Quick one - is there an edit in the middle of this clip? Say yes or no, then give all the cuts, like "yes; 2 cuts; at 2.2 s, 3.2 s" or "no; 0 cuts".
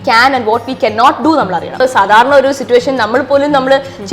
yes; 1 cut; at 1.8 s